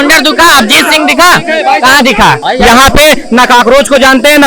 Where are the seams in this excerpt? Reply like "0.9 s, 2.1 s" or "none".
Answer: 2.4 s